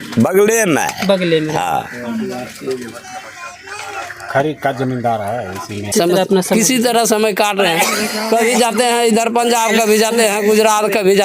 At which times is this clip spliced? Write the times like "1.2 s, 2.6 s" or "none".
5.9 s